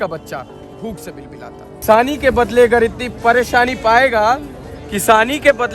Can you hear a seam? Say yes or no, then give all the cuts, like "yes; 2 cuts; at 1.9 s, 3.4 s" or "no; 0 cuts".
yes; 1 cut; at 1.8 s